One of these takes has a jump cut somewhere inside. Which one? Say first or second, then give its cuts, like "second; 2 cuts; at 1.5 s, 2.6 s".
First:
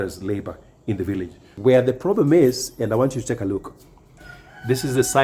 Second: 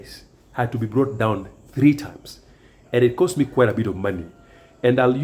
first; 1 cut; at 1.5 s